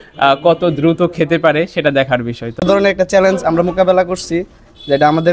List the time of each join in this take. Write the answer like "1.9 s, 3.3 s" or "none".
2.6 s